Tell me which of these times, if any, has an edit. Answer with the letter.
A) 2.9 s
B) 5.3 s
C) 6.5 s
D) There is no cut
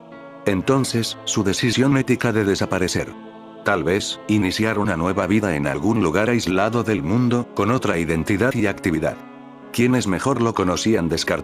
A